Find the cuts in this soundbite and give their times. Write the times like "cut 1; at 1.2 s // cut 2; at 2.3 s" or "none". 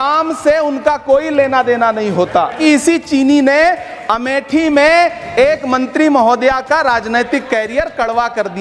cut 1; at 2.6 s